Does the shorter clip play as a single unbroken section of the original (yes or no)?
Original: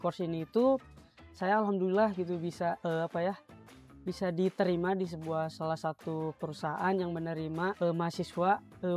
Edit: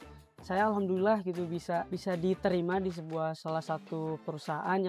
no